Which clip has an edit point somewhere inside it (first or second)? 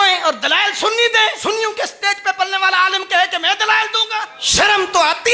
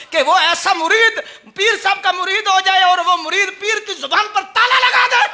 first